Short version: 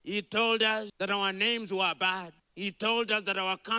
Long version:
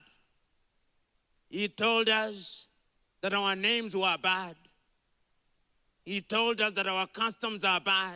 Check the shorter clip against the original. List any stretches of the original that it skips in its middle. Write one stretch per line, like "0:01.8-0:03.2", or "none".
0:02.4-0:03.1
0:04.6-0:05.9

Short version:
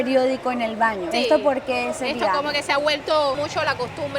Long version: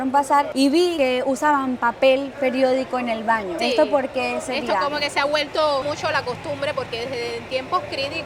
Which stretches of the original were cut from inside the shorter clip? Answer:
none

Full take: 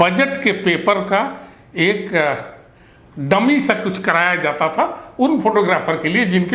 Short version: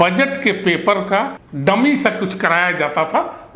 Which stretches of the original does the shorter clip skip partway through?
0:01.4-0:03.1

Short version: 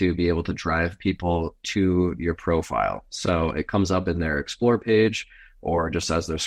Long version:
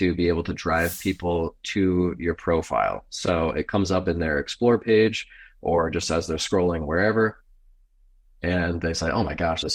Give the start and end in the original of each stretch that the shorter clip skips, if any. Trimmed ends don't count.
none

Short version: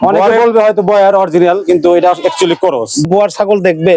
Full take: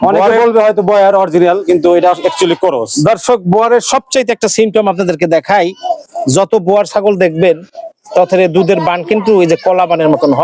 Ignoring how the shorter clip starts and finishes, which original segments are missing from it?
0:03.0-0:06.6

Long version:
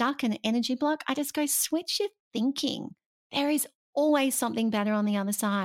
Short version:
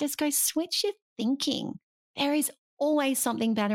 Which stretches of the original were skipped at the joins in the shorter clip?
none

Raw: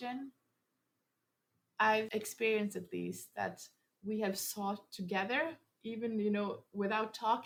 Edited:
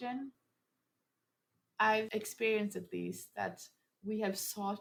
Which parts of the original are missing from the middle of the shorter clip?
none

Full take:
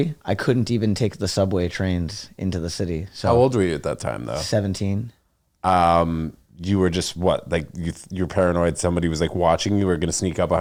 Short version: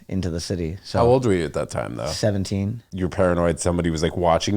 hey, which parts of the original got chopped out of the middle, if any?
0:05.1-0:08.0

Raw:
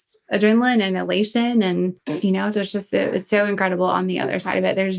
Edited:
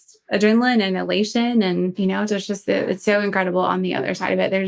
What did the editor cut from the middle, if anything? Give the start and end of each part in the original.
0:02.0-0:02.2

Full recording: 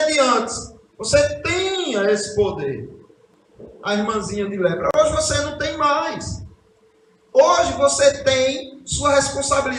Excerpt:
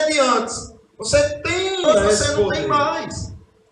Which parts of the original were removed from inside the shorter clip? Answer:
0:02.6-0:05.7

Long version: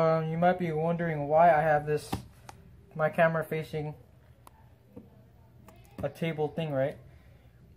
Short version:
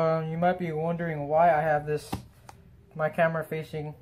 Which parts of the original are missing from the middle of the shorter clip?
none

